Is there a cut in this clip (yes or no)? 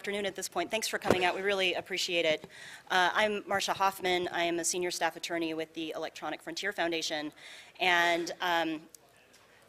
no